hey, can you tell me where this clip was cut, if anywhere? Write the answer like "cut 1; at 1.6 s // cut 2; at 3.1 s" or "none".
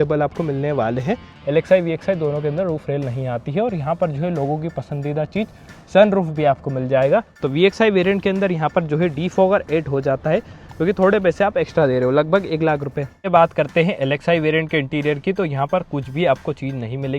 cut 1; at 1.3 s // cut 2; at 7.4 s // cut 3; at 13.3 s